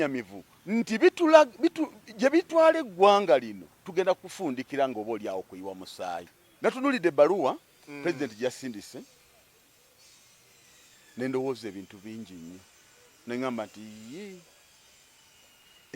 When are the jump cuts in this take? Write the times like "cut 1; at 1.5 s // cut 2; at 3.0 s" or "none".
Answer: cut 1; at 6.4 s